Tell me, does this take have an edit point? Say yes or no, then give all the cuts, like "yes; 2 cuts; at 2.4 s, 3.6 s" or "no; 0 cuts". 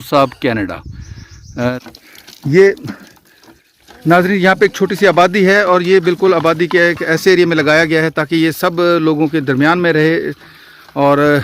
yes; 1 cut; at 1.7 s